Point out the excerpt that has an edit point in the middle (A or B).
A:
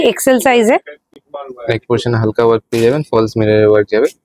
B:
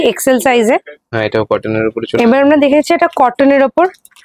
B